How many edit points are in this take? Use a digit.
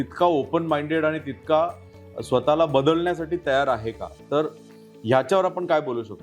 0